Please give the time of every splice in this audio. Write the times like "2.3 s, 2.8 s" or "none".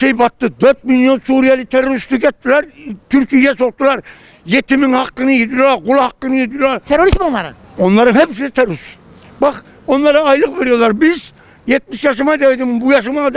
none